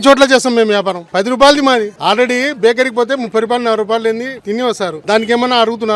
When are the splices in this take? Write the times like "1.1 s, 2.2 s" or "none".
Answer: 1.0 s, 1.9 s, 4.6 s